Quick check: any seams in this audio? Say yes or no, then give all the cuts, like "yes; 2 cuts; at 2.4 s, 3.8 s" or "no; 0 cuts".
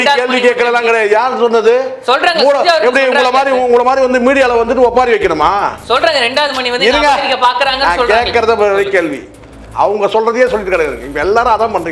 no; 0 cuts